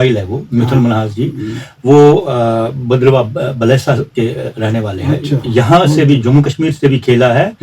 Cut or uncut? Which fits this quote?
uncut